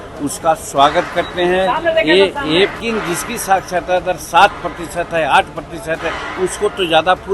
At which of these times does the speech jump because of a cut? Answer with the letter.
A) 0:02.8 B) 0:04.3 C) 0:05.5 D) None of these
A